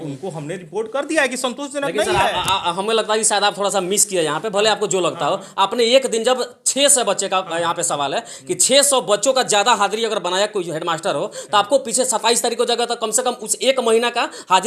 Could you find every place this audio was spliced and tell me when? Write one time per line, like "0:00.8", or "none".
none